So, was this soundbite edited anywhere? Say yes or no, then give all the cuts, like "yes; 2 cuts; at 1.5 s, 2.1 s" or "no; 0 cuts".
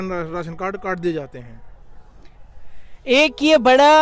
no; 0 cuts